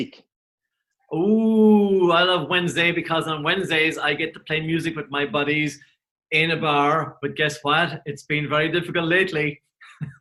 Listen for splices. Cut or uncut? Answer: uncut